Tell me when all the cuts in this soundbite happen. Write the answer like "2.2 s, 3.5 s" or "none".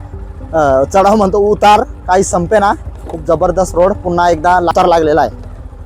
4.7 s